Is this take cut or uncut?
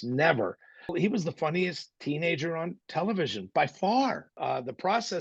cut